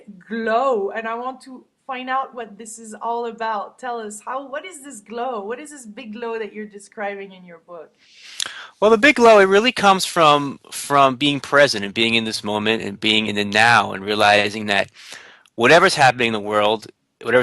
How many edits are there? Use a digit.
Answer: 1